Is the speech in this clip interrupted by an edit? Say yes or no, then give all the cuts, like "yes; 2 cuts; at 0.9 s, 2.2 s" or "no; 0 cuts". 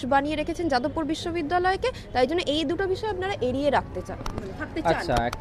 no; 0 cuts